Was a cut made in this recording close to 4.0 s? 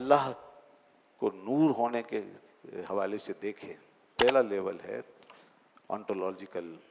yes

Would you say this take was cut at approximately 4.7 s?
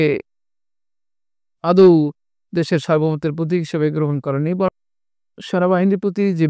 yes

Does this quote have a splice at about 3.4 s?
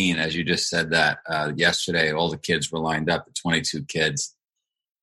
no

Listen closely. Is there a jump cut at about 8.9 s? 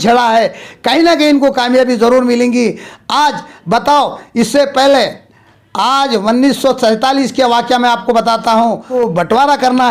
yes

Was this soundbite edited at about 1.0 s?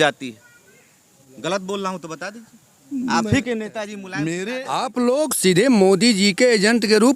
no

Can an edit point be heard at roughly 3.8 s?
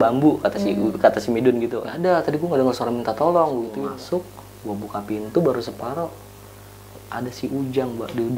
yes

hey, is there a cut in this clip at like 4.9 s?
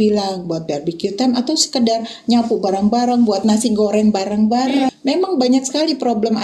yes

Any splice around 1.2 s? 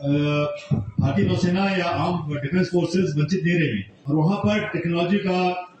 no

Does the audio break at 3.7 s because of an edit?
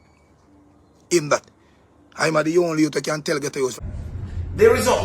yes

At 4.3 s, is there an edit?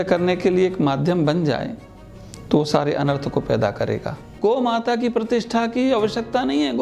yes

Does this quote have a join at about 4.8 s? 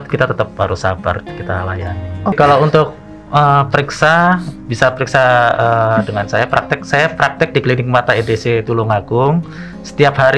no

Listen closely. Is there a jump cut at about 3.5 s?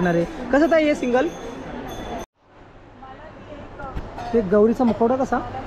no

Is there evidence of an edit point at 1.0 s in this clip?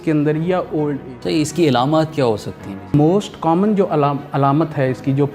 yes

